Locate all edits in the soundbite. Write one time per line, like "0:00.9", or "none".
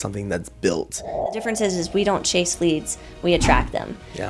0:01.4